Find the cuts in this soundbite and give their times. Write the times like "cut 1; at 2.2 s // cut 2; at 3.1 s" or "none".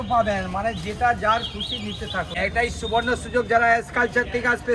cut 1; at 2.3 s